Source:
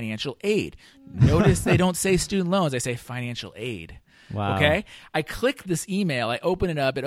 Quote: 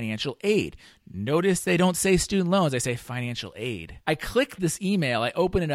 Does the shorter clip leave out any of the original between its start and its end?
yes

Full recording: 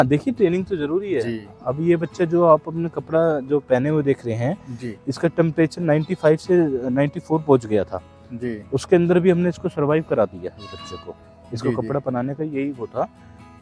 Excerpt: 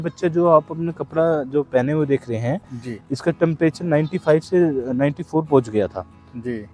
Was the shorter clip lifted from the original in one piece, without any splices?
yes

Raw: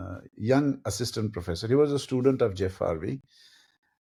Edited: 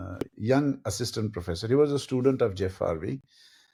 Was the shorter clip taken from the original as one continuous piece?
yes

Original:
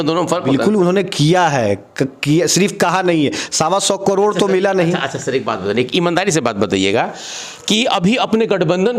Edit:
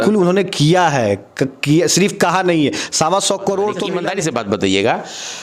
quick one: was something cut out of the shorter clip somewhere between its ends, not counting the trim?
yes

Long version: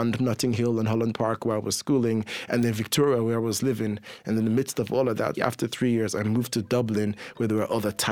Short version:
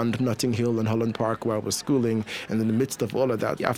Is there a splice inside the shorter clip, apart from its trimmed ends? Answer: yes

